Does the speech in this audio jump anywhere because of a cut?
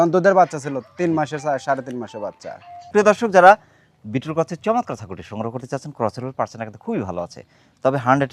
no; 0 cuts

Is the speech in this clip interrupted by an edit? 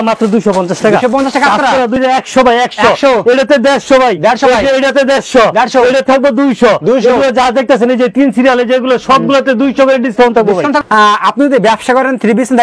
yes; 2 cuts; at 2.0 s, 10.8 s

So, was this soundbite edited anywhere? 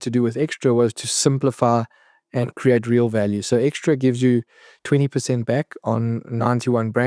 no; 0 cuts

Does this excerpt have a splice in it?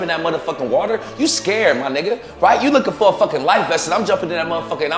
no; 0 cuts

